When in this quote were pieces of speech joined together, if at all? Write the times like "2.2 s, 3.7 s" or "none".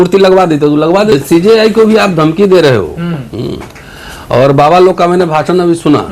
1.1 s